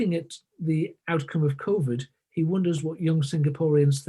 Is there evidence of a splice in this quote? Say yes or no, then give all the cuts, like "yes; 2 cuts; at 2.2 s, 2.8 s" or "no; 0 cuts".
yes; 1 cut; at 1.0 s